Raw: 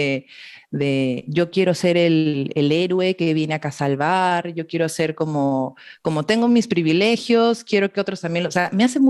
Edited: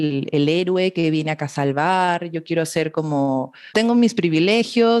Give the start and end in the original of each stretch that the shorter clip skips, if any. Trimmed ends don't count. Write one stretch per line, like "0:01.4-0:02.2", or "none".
0:05.9-0:06.2